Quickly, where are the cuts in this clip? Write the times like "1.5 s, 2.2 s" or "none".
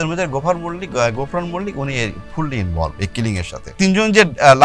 3.7 s